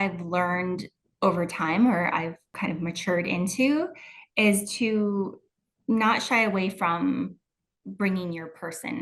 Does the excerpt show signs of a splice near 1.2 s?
no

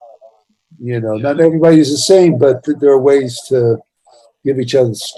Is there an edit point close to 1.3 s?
no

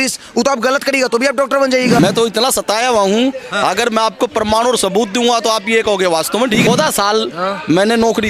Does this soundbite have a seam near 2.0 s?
yes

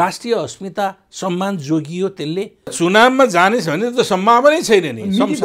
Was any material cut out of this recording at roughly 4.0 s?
no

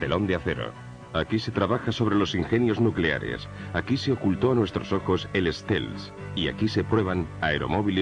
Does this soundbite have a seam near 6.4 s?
yes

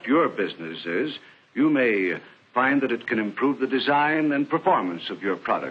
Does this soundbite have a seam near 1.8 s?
yes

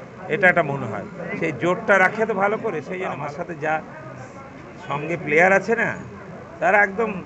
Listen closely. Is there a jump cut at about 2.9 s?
yes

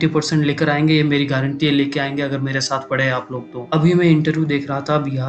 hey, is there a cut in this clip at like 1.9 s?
no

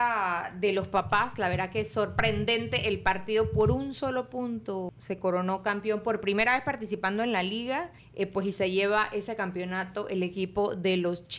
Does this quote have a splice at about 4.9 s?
yes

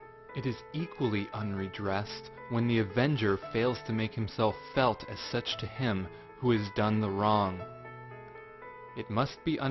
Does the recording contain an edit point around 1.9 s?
no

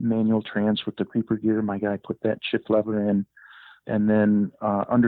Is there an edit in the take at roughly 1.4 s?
no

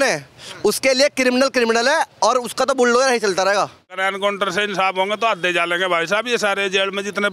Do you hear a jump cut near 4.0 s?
yes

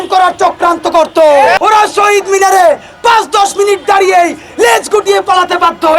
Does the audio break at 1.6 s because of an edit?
yes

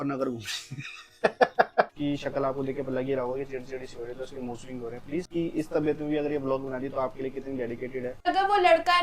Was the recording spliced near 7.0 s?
no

